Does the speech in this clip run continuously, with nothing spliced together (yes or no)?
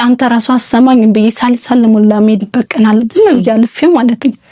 yes